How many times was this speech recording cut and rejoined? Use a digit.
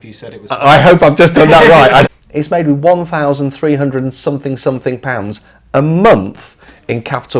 1